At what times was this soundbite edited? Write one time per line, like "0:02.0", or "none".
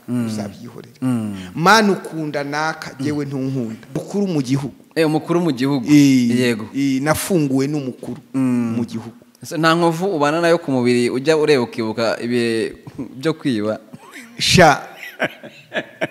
0:04.0